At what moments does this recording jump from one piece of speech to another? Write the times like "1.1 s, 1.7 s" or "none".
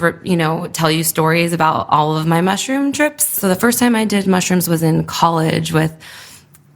3.3 s